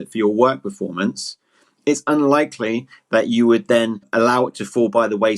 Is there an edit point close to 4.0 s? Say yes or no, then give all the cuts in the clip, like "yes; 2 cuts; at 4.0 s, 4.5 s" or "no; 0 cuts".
yes; 1 cut; at 4.0 s